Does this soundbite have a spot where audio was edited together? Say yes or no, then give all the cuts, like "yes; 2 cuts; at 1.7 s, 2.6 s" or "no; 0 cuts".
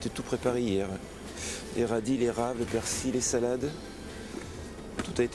no; 0 cuts